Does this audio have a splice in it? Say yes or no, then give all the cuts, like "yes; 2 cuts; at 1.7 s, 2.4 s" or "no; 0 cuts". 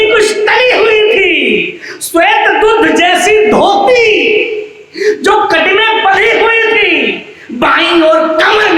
no; 0 cuts